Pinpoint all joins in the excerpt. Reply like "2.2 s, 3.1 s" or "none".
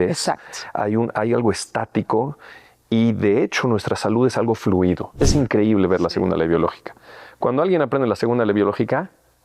5.1 s